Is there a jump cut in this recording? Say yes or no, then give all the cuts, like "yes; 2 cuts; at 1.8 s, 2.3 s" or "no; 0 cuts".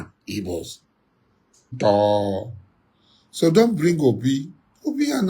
yes; 1 cut; at 1.8 s